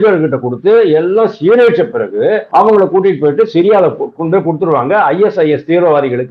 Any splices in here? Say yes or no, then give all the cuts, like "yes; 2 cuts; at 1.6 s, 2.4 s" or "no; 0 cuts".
yes; 1 cut; at 2.4 s